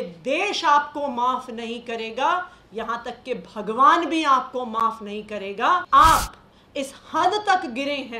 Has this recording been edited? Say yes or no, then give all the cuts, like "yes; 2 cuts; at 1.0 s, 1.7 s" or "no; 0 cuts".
yes; 1 cut; at 5.8 s